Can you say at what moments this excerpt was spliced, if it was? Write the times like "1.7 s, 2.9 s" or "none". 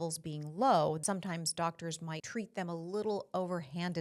1.0 s, 2.2 s